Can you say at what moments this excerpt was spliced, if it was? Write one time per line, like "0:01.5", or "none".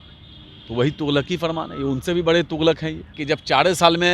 0:03.1